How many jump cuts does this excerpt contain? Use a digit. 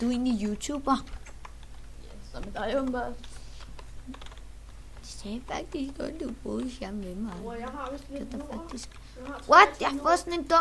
0